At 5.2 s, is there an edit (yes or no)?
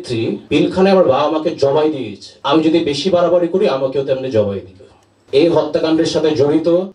yes